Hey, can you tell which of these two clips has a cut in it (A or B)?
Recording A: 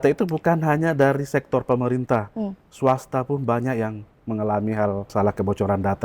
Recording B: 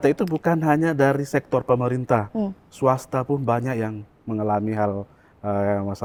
A